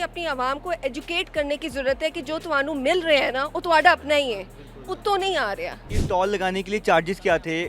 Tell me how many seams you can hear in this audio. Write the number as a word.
one